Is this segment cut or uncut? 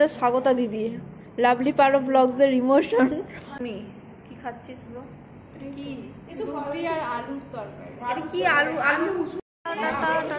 cut